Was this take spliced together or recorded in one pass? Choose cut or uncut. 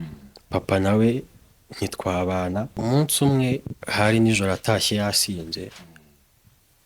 cut